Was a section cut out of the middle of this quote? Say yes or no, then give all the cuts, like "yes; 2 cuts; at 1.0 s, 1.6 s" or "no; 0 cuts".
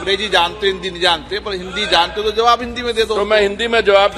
no; 0 cuts